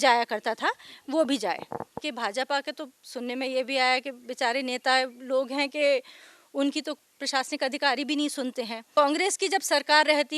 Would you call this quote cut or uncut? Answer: cut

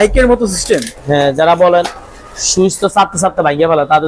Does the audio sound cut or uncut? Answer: uncut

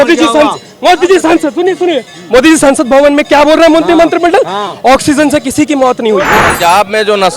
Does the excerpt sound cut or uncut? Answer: cut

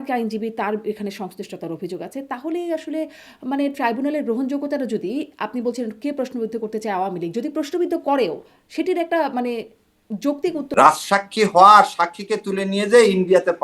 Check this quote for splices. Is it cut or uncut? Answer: cut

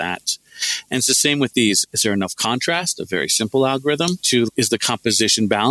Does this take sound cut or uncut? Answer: cut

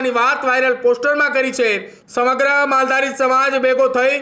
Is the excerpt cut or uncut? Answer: cut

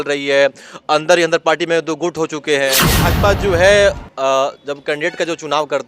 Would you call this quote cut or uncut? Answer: cut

